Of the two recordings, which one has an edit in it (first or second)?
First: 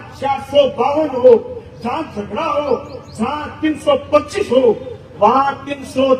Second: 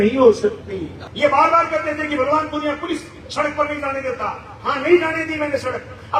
second